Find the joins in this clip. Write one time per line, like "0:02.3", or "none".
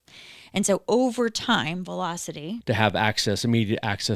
0:02.5